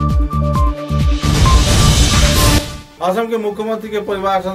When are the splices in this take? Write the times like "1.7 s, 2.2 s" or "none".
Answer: 2.8 s